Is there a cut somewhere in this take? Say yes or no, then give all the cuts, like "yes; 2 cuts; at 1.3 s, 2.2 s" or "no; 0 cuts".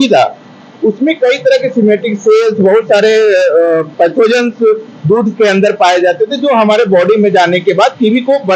no; 0 cuts